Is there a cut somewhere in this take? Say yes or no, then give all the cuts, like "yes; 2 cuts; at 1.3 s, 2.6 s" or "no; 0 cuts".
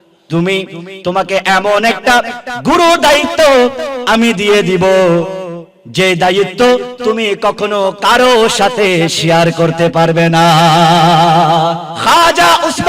yes; 1 cut; at 11.9 s